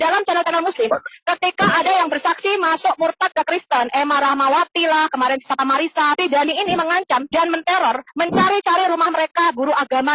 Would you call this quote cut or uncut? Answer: cut